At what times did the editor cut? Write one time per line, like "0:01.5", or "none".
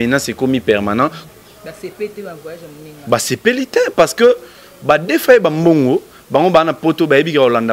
0:01.2

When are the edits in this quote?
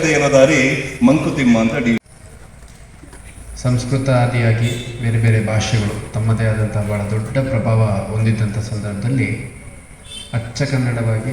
0:02.0

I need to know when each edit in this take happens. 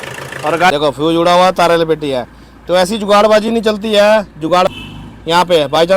0:00.7
0:04.7

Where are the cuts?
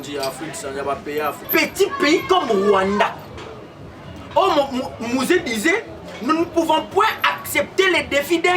0:01.5

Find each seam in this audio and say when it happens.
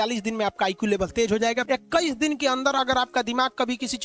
0:01.6

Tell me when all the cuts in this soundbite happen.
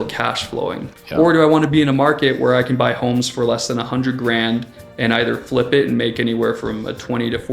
0:00.9

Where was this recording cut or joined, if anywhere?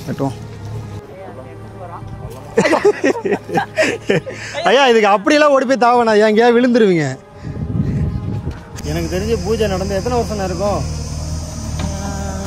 0:01.0
0:08.7

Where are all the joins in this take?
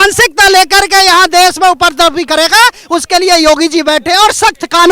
none

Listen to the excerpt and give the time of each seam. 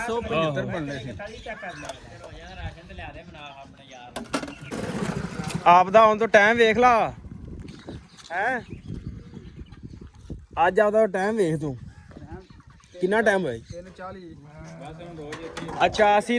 0:04.6

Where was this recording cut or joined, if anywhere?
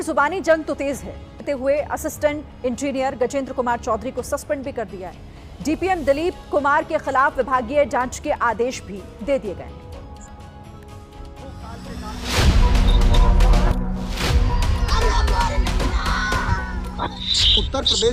0:01.4
0:13.7

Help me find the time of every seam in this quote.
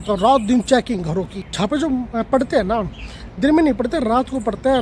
0:01.4

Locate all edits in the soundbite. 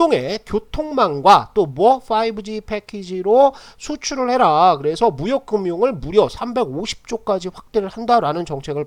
none

